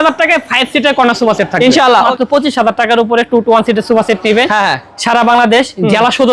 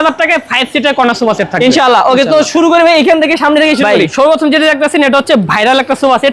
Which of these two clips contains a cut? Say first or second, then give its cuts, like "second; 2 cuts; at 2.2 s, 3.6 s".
first; 1 cut; at 2.1 s